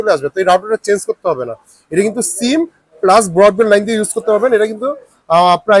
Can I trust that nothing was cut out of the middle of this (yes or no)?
yes